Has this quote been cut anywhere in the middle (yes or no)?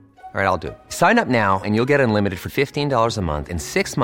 no